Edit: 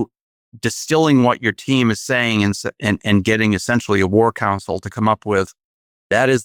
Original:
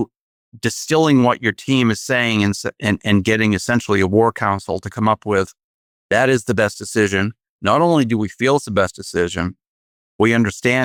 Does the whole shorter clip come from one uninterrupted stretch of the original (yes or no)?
yes